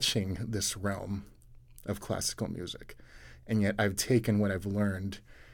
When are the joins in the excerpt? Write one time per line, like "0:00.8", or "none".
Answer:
none